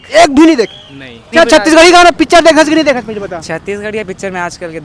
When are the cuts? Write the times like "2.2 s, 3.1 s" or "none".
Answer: 1.3 s